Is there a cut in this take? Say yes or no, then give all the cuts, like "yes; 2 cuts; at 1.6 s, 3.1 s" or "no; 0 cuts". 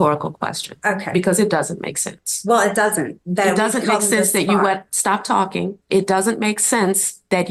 no; 0 cuts